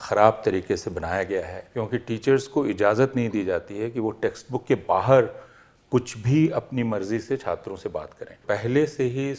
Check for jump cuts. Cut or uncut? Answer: cut